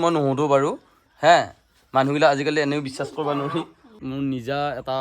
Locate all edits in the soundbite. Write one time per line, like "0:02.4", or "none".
0:04.0